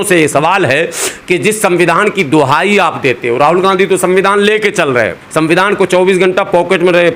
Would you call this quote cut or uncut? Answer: uncut